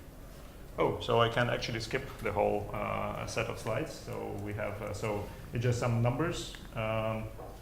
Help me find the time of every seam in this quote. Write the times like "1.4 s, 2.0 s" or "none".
5.9 s